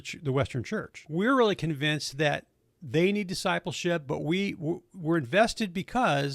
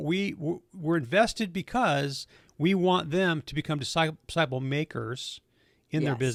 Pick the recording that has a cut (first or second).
first